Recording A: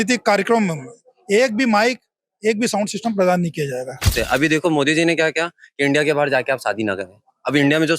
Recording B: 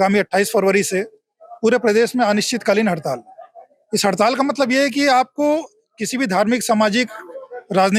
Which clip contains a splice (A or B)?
A